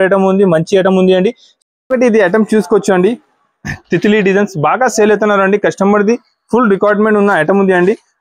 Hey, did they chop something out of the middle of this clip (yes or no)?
yes